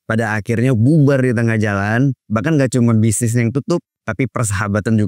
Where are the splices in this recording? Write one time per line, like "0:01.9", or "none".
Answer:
0:04.0